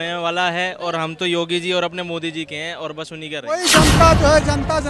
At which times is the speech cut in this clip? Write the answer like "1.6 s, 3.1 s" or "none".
3.6 s